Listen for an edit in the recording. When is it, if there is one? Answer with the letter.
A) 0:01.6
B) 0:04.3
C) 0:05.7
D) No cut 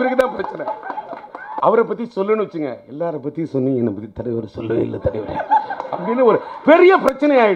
A